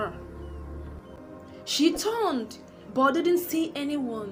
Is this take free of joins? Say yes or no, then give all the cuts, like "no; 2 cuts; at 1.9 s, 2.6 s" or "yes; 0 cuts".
yes; 0 cuts